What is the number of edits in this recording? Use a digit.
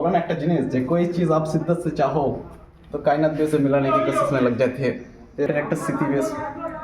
1